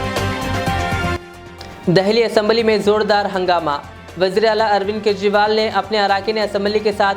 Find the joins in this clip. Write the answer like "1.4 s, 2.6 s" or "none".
1.1 s